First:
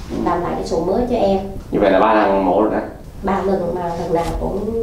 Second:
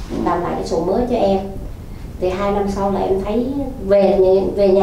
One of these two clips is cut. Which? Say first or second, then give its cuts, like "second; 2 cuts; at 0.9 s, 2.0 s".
first; 2 cuts; at 1.6 s, 3.0 s